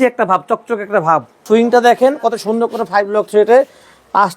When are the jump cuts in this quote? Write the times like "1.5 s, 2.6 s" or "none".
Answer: 1.4 s